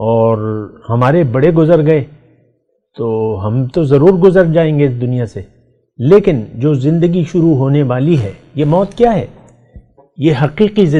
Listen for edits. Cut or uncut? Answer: uncut